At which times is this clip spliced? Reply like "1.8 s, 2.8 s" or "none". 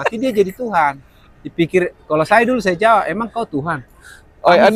none

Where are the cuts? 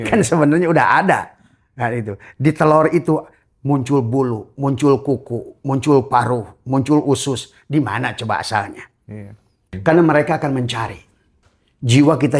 9.7 s

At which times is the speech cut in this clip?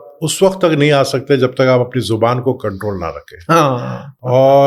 none

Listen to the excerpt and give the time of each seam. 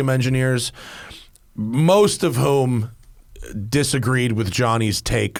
none

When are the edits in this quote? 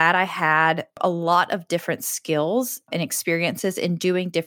1.0 s

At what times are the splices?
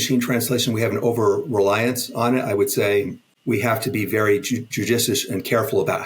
3.2 s

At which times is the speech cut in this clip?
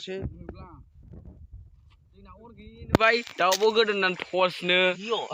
none

